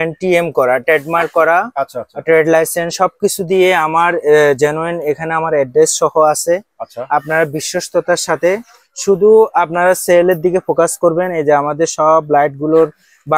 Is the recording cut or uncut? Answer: uncut